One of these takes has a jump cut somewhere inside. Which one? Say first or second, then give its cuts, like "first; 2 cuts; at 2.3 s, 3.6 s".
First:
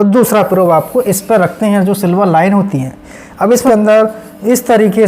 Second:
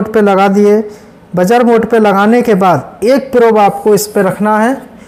first; 1 cut; at 3.6 s